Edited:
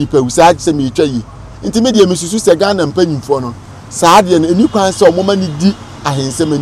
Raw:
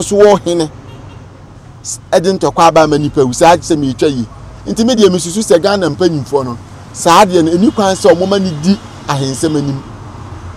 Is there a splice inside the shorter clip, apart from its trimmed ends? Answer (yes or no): no